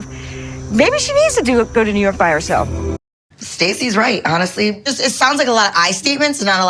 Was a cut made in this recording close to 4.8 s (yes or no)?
no